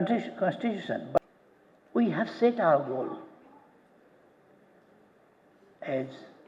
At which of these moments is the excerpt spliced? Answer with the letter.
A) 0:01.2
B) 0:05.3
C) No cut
A